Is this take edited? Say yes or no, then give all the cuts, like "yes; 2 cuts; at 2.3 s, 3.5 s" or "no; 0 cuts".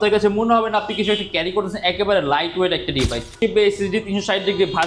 yes; 1 cut; at 3.4 s